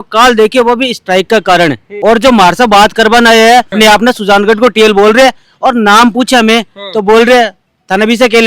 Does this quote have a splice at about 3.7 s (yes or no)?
yes